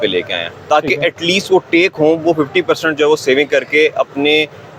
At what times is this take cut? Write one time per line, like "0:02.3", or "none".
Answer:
none